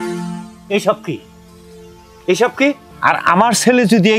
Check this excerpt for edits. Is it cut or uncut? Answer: cut